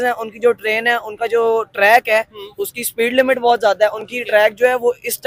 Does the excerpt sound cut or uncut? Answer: uncut